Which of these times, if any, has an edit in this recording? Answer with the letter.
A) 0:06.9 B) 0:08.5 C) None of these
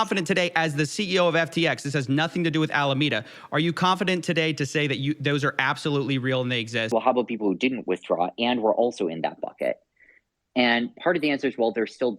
A